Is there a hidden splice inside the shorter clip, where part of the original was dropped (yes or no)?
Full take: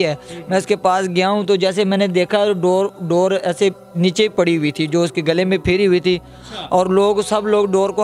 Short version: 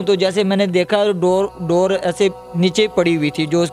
no